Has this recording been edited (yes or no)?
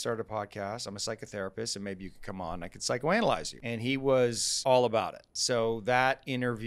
yes